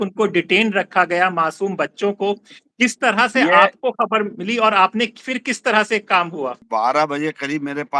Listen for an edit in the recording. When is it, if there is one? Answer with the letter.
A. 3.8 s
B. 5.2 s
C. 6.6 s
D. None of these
C